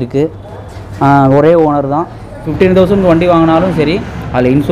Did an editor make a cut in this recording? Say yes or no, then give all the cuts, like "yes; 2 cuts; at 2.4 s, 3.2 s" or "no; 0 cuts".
yes; 1 cut; at 2.5 s